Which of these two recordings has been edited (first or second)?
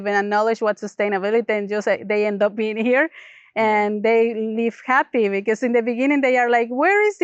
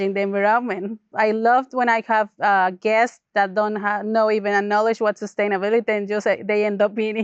second